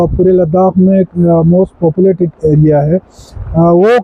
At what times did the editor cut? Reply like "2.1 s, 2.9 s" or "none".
none